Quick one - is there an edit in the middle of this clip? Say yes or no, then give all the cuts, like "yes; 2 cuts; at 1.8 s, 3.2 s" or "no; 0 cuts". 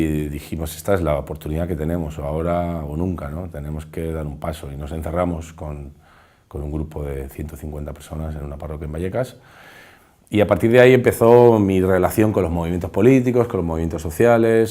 yes; 1 cut; at 1.5 s